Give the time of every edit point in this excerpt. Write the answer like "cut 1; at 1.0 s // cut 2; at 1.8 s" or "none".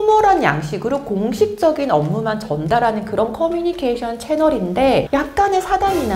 none